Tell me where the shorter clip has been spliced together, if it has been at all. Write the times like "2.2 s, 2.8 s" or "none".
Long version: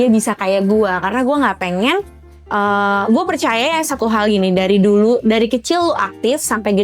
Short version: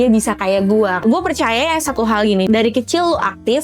1.0 s, 2.5 s